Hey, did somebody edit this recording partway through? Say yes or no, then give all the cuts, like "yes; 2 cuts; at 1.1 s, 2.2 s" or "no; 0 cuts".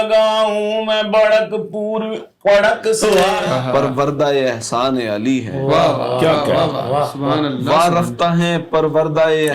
yes; 1 cut; at 3.4 s